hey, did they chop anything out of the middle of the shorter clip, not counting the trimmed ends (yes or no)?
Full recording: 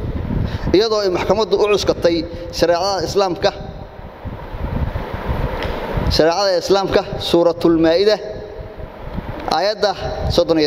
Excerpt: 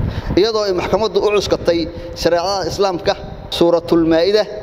yes